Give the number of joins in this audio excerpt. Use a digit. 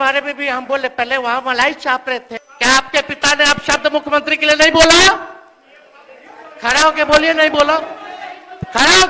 1